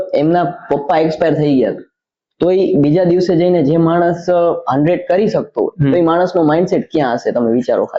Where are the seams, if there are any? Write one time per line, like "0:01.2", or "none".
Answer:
none

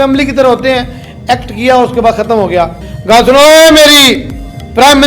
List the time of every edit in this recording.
0:02.8

